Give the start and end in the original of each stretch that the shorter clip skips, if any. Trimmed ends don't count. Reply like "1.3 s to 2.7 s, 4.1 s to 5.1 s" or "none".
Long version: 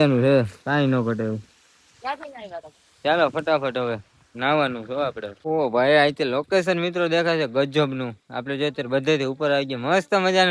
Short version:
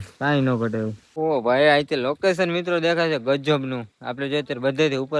1.5 s to 5.3 s